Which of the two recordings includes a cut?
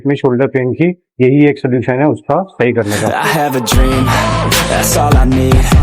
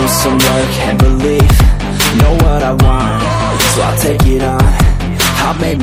first; 2 cuts; at 1.1 s, 3.1 s

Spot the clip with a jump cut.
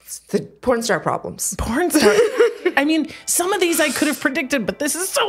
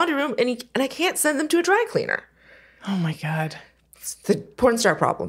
first; 1 cut; at 2.7 s

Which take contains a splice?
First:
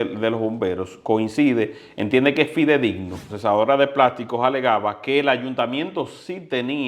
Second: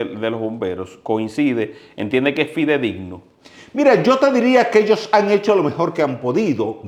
first; 1 cut; at 3.3 s

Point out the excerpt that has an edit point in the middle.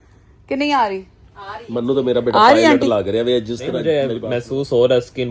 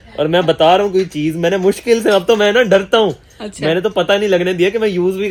first; 1 cut; at 3.8 s

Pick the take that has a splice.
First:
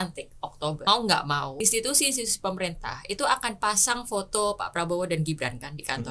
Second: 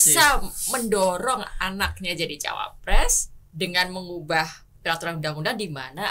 first; 2 cuts; at 0.8 s, 1.5 s

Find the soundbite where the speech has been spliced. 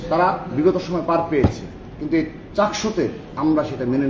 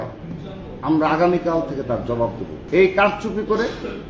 second; 1 cut; at 2.5 s

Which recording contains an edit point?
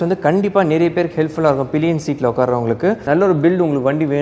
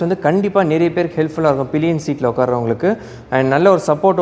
first; 1 cut; at 3.1 s

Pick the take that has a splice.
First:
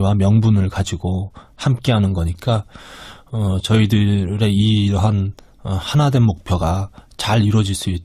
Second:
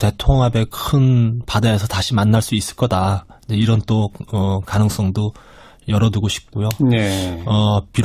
first; 1 cut; at 6.4 s

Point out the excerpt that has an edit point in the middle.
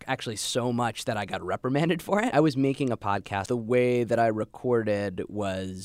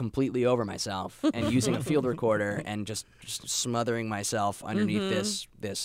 first; 2 cuts; at 2.3 s, 3.4 s

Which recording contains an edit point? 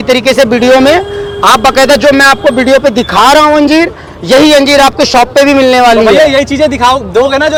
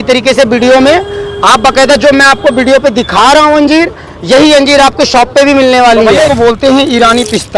second; 1 cut; at 6.3 s

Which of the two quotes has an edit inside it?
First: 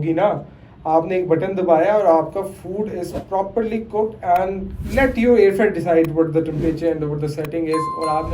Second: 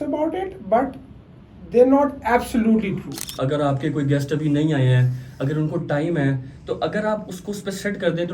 second; 1 cut; at 3.3 s

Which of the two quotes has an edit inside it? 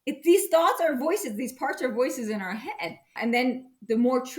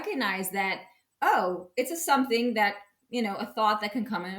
first; 1 cut; at 3.1 s

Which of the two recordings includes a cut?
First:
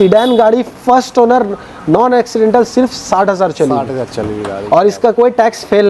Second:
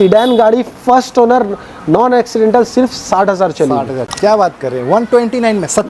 second; 1 cut; at 4.0 s

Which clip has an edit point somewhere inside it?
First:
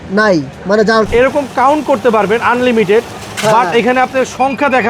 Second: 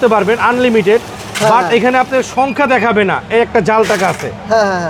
first; 1 cut; at 1.1 s

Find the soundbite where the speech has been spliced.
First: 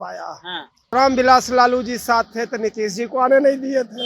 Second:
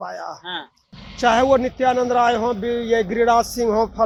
first; 1 cut; at 0.9 s

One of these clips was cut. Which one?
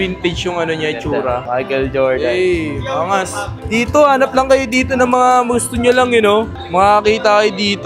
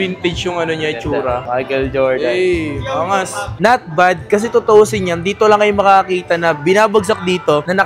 second; 1 cut; at 3.5 s

